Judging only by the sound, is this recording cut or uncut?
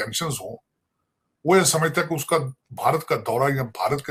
uncut